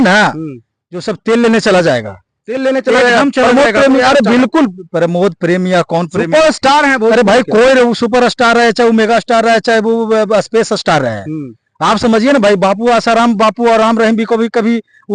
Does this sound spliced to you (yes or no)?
no